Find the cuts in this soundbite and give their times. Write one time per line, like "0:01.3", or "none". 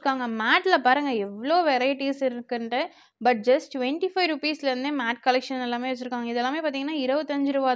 none